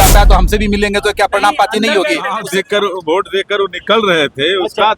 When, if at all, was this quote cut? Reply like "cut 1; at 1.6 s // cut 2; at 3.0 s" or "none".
cut 1; at 2.4 s